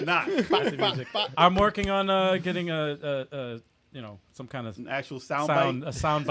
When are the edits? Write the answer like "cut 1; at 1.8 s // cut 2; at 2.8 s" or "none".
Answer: none